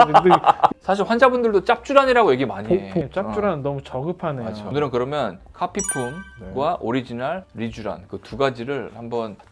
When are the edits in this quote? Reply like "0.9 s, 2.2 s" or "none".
4.7 s